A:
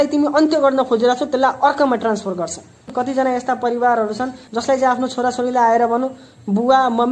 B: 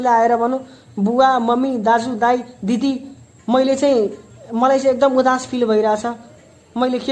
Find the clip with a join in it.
A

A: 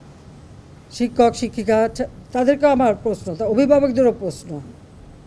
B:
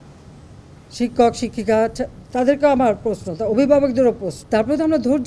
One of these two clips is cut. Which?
B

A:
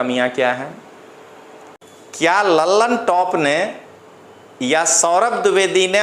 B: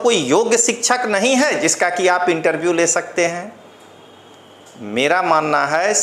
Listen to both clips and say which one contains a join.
A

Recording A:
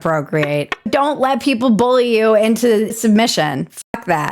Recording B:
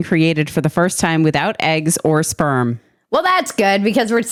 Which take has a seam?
A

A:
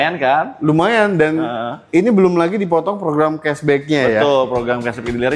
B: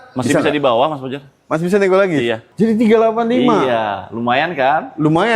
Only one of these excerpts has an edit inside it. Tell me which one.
B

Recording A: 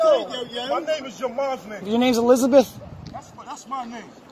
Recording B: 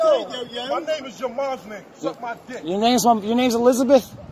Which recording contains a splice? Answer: A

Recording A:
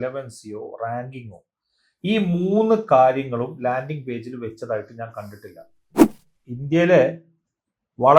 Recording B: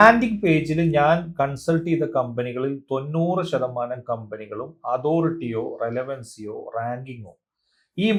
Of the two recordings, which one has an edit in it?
A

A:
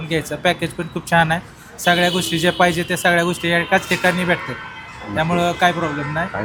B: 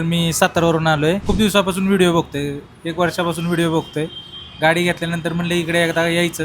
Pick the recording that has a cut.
B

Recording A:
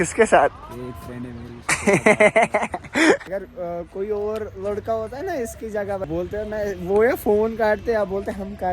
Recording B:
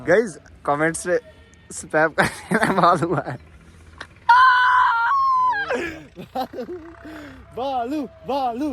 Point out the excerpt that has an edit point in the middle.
A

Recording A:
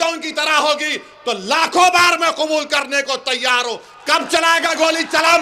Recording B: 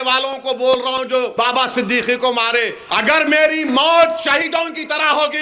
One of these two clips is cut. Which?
B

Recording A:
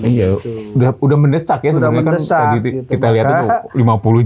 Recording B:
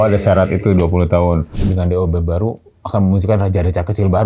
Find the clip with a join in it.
B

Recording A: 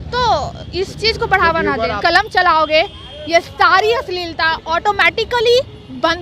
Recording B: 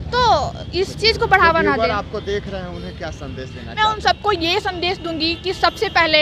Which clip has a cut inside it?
A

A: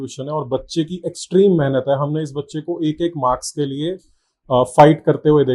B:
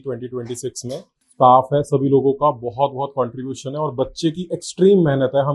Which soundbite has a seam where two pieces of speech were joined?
B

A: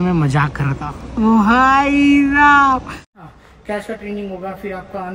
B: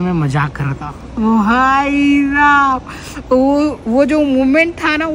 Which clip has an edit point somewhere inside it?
A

